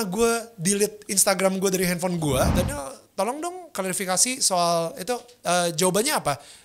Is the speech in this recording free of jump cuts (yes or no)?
no